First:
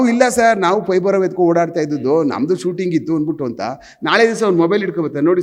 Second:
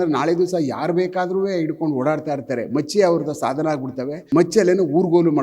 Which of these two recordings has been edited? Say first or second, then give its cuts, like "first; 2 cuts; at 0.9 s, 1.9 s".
second; 1 cut; at 4.1 s